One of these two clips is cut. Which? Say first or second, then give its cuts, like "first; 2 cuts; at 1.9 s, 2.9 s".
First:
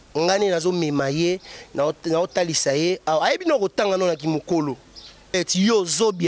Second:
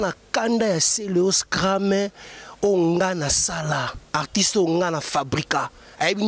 first; 1 cut; at 5.3 s